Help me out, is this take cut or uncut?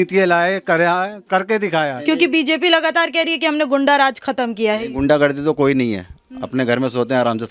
cut